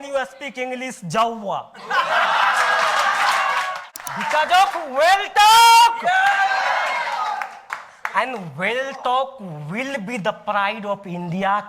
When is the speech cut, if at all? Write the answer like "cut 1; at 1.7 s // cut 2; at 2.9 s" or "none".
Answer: cut 1; at 3.9 s